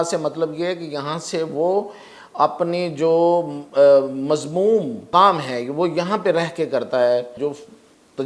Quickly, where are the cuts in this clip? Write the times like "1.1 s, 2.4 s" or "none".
5.0 s, 7.4 s